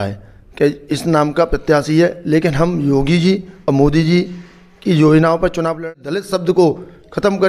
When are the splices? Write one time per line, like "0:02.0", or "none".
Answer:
0:05.8